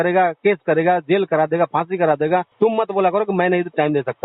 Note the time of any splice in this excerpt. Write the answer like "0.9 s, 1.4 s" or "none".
2.5 s

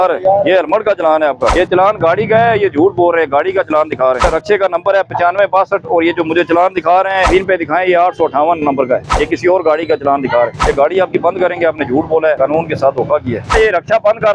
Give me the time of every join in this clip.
1.5 s, 4.2 s, 7.3 s, 9.1 s, 10.6 s, 12.4 s, 13.5 s

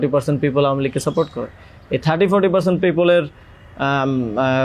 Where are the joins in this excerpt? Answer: none

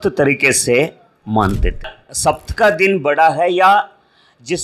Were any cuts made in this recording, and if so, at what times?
2.0 s

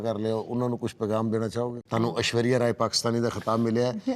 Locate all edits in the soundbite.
1.8 s

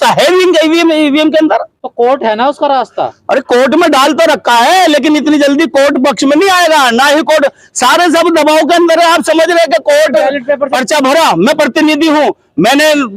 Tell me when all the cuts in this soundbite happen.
1.8 s, 10.7 s

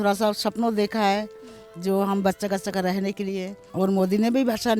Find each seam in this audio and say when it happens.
3.6 s

